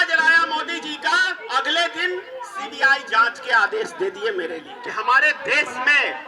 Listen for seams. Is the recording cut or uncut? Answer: cut